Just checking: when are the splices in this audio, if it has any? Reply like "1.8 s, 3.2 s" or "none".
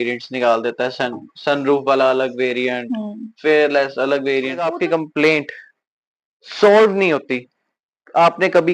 4.7 s